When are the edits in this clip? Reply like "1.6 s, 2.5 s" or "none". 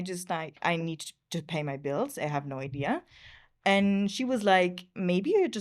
none